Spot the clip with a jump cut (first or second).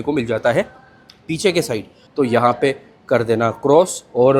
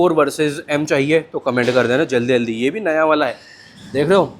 first